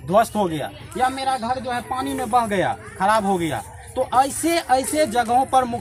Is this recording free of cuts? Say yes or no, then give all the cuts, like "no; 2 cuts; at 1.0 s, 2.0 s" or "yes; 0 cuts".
yes; 0 cuts